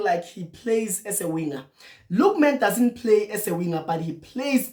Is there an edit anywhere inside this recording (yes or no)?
no